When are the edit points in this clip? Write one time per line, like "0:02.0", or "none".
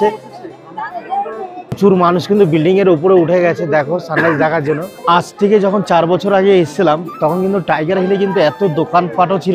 0:01.8
0:04.9